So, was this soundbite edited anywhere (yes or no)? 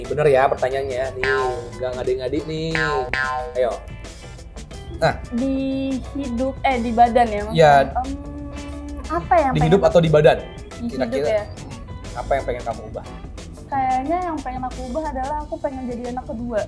no